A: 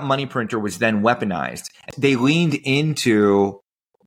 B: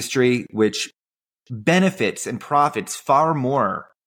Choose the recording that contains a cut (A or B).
A